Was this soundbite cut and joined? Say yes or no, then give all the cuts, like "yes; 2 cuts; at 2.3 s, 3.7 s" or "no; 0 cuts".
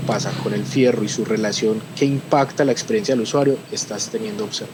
no; 0 cuts